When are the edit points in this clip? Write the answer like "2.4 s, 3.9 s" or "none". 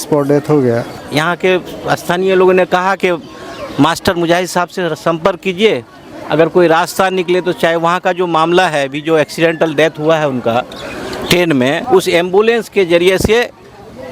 1.0 s, 11.8 s